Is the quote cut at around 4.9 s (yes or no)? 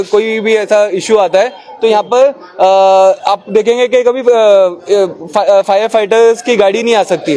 no